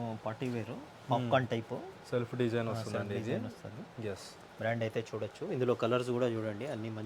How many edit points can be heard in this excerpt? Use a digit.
0